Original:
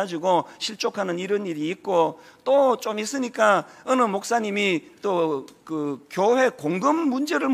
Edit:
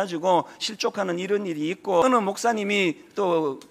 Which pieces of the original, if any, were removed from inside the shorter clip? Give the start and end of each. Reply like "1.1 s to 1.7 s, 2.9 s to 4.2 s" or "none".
2.0 s to 3.9 s